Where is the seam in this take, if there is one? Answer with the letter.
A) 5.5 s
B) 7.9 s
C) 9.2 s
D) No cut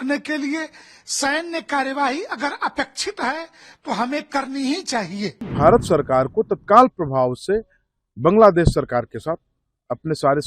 A